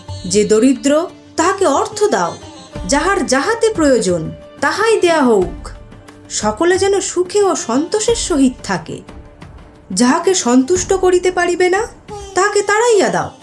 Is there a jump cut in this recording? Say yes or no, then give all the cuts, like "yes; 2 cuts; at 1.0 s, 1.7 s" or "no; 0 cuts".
no; 0 cuts